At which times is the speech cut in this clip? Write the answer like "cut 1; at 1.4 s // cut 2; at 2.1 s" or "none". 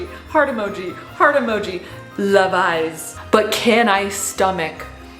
cut 1; at 3.2 s